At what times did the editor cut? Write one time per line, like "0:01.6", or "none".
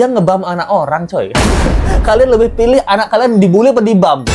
none